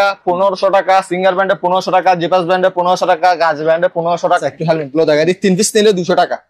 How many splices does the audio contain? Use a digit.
1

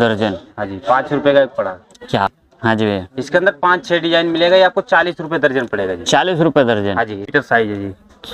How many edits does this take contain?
2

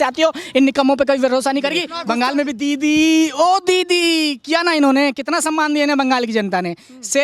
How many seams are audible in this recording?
1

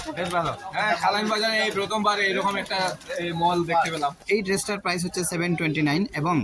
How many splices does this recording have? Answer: 1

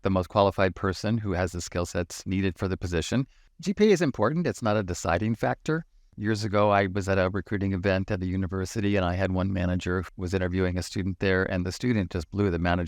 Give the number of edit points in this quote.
2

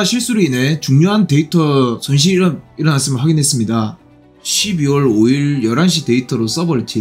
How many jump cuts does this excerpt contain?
0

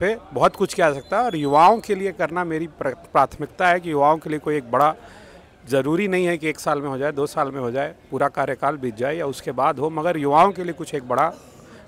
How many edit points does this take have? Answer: 0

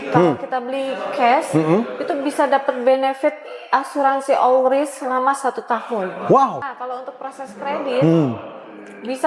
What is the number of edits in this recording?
1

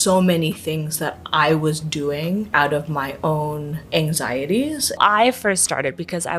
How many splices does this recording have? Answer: 2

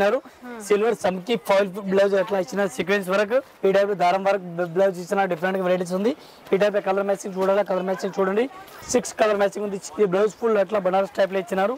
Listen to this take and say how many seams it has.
2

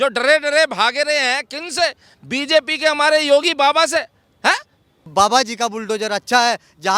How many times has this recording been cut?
1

